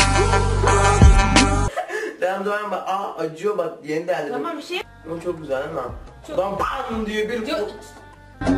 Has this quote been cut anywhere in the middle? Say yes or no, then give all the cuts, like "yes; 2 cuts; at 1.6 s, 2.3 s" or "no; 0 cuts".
yes; 1 cut; at 4.9 s